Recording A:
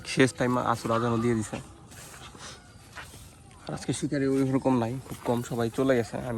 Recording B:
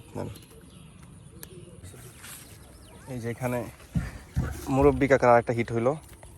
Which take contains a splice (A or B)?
B